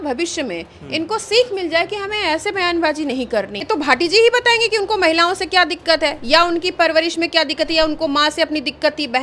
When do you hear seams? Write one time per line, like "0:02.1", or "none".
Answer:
0:03.6